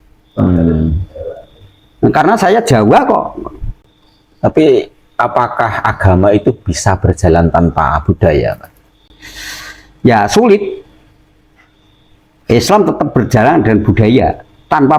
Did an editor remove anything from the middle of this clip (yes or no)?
no